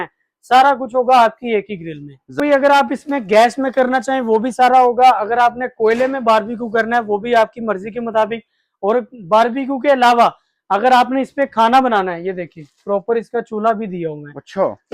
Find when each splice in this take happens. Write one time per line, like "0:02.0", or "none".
0:02.4